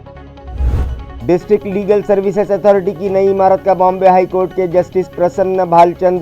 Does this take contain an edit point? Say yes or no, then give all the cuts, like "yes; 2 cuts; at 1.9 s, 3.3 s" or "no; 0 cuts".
yes; 1 cut; at 1.0 s